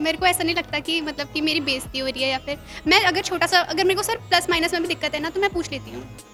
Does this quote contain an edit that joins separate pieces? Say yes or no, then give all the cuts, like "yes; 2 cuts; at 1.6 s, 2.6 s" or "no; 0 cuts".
no; 0 cuts